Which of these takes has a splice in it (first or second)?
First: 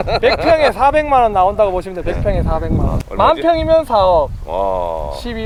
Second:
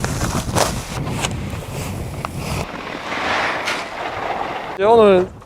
second